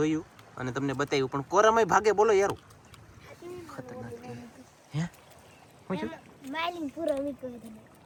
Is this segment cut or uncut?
uncut